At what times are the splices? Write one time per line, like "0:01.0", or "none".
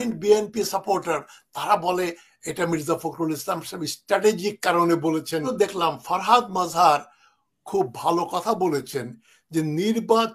0:05.5